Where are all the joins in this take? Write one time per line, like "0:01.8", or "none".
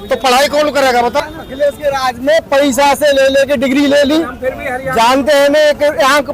0:01.2